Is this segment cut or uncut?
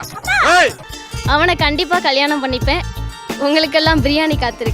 cut